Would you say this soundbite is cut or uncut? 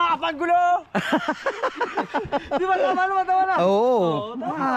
uncut